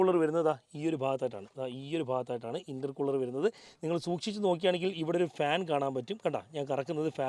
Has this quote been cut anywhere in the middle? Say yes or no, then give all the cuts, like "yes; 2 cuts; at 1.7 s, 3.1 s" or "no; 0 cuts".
no; 0 cuts